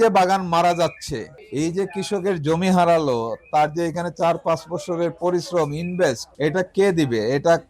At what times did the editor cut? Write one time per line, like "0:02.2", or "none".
0:01.4
0:06.3